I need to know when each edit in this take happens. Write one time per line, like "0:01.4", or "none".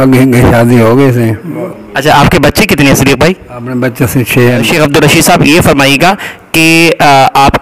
0:04.7